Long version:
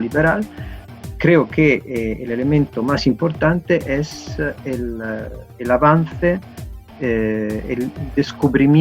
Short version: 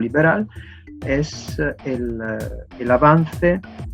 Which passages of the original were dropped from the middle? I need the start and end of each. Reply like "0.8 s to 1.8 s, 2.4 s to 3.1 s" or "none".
1.0 s to 3.9 s